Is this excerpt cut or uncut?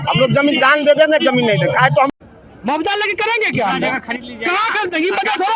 cut